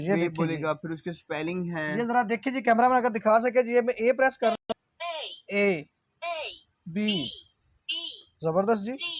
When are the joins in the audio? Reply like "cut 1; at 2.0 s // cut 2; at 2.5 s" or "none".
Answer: none